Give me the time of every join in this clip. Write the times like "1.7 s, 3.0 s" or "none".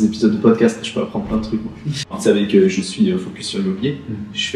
2.2 s